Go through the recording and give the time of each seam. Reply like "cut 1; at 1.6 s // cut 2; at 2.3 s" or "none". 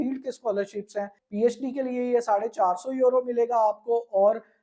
cut 1; at 1.2 s